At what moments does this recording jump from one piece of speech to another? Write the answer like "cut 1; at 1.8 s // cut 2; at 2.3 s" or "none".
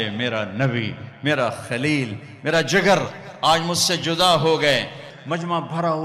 cut 1; at 5.1 s